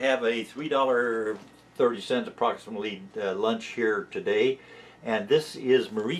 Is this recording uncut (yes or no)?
no